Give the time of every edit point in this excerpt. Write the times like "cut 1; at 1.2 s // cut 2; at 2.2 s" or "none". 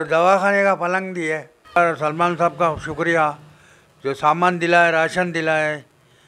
cut 1; at 1.6 s